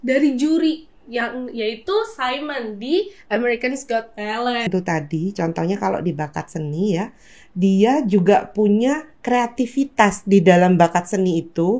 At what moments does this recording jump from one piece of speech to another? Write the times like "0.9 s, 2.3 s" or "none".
4.7 s